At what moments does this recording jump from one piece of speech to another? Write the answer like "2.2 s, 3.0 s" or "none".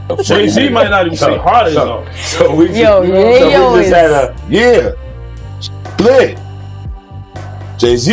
4.4 s